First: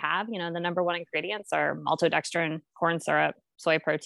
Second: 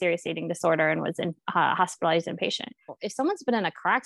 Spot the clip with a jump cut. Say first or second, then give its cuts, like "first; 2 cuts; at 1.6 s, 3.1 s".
second; 1 cut; at 3.0 s